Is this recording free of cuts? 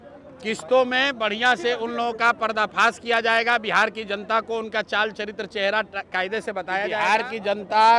no; 1 cut; at 6.9 s

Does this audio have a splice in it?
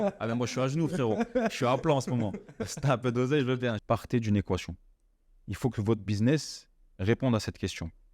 yes; 1 cut; at 3.8 s

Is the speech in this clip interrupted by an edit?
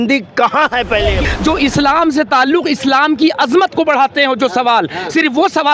yes; 1 cut; at 1.2 s

